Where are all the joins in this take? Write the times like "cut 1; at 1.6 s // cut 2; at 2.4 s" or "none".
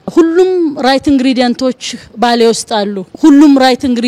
cut 1; at 3.1 s